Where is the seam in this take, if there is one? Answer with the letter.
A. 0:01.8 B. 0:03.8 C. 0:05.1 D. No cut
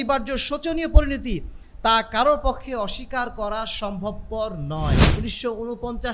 C